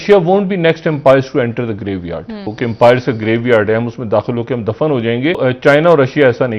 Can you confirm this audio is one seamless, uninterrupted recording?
no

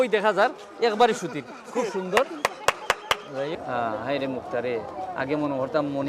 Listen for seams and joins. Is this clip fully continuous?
no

